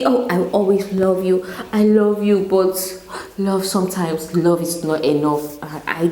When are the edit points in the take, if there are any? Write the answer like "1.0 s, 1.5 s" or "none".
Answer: none